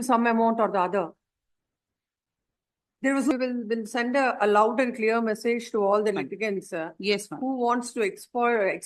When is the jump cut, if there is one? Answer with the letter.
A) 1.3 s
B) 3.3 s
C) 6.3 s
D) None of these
B